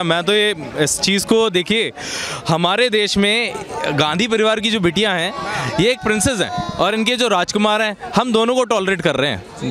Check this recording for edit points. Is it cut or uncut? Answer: uncut